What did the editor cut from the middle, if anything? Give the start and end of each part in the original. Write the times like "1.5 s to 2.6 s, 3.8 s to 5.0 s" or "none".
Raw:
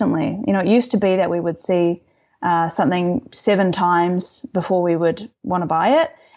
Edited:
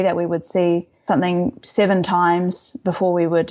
2.2 s to 2.7 s